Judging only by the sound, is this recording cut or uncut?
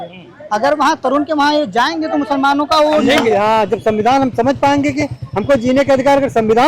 cut